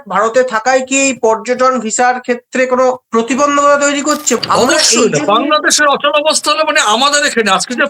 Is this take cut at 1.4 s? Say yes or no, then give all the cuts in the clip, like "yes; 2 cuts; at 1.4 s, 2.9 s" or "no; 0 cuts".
no; 1 cut; at 4.4 s